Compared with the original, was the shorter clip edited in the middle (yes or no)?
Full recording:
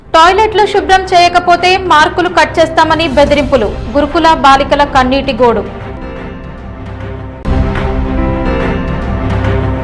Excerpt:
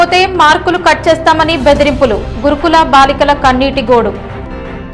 no